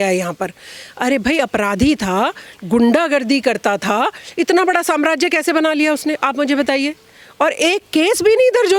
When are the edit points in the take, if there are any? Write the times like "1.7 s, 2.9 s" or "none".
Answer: none